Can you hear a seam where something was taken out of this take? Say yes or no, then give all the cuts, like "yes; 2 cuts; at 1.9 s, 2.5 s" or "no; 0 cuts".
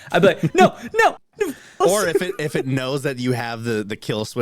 yes; 1 cut; at 1.8 s